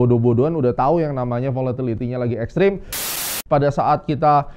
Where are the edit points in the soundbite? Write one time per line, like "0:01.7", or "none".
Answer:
0:03.1